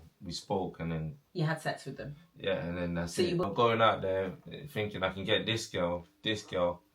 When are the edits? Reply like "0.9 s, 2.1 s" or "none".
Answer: 3.5 s